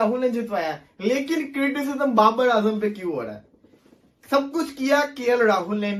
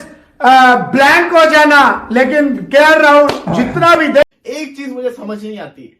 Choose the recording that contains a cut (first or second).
second